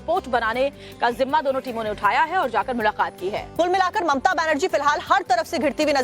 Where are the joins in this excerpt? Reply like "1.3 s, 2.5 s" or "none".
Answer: 4.9 s